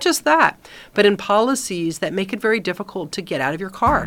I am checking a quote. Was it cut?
no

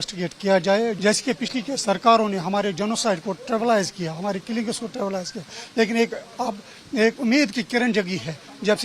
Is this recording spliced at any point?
yes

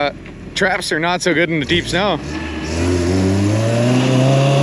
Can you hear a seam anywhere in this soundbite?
no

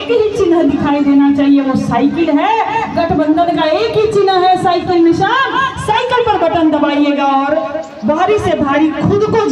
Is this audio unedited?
yes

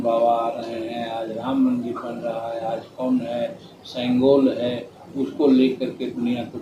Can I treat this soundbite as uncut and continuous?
yes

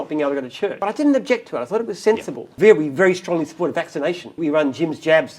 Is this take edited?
yes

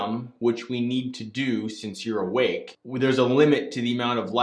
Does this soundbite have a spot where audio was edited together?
yes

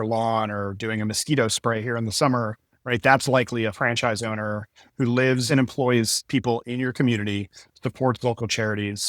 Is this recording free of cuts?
no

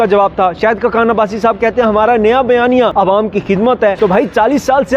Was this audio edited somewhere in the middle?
yes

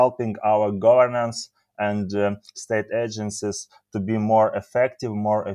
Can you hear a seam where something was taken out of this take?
no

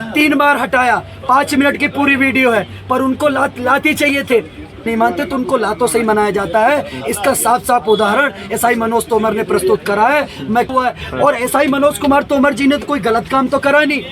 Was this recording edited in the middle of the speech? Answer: yes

